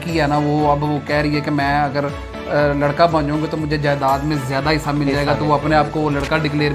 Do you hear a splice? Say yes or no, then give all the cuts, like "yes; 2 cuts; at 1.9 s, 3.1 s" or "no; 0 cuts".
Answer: no; 0 cuts